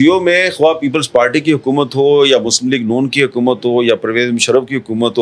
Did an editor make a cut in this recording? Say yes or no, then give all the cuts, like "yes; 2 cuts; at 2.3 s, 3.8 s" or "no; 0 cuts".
no; 0 cuts